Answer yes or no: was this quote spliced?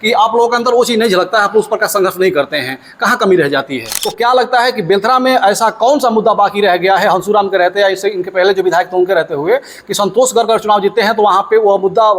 yes